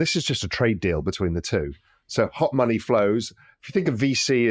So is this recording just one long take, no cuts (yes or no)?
yes